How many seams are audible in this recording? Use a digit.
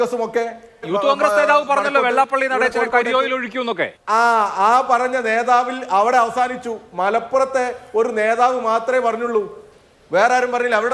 2